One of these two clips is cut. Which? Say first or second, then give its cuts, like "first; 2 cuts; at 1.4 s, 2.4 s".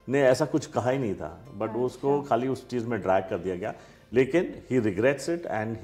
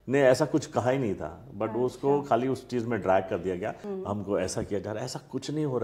second; 1 cut; at 3.8 s